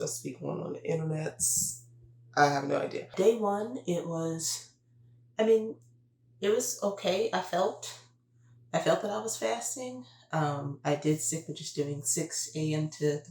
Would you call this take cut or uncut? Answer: cut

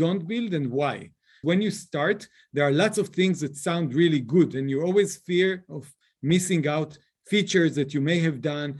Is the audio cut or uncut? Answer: cut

